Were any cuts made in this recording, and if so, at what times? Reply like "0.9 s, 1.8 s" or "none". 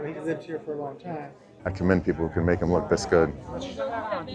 1.5 s